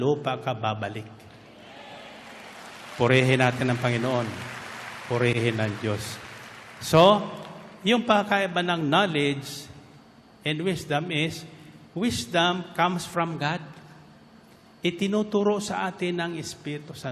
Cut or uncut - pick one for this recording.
uncut